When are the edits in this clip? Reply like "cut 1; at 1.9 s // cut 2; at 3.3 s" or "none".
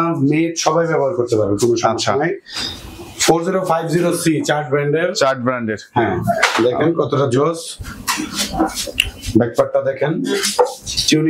none